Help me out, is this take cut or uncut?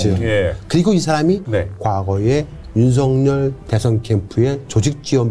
cut